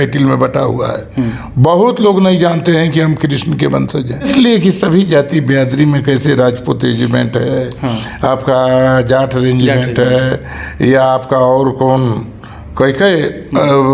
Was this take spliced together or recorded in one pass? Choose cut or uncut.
cut